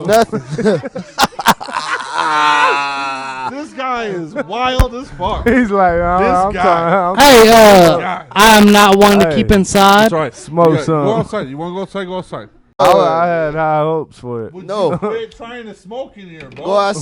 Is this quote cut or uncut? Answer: cut